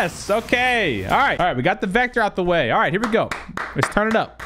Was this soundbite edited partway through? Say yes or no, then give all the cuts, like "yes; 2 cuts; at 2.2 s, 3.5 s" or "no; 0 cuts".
yes; 1 cut; at 1.3 s